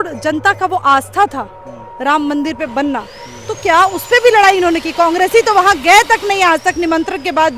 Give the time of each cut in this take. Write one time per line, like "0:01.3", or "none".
none